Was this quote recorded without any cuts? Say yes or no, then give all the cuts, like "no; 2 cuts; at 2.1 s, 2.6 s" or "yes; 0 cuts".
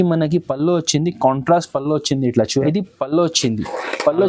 no; 1 cut; at 2.6 s